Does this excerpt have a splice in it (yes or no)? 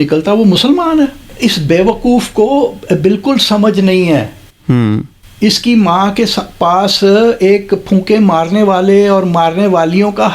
yes